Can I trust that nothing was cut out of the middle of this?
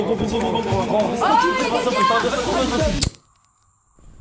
no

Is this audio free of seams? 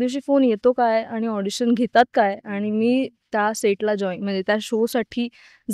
yes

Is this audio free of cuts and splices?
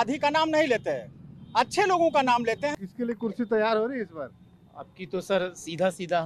no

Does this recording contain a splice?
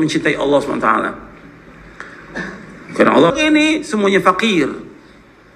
yes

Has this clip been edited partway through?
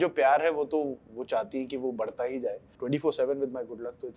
yes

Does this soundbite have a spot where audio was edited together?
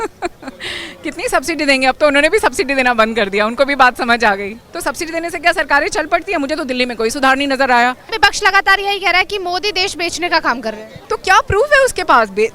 yes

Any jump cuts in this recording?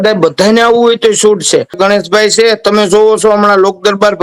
yes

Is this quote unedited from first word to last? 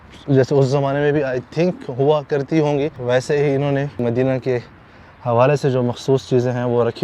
no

